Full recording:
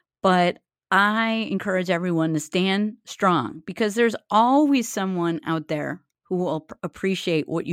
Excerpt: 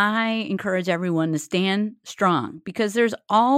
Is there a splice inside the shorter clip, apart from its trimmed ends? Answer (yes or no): no